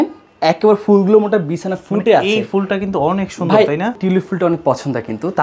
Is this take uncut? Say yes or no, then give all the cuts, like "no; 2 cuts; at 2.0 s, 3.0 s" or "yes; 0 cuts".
no; 1 cut; at 4.0 s